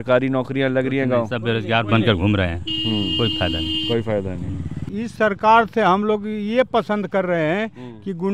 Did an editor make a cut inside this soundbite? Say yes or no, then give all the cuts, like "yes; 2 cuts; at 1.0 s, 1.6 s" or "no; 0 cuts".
yes; 1 cut; at 4.8 s